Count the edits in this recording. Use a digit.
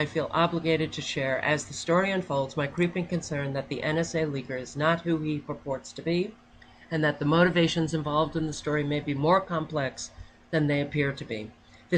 0